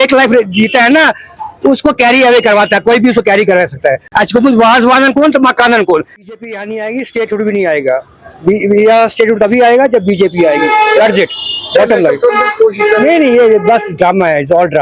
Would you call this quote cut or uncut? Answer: cut